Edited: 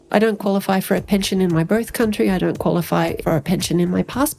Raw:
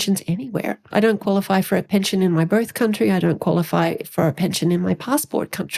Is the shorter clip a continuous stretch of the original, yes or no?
no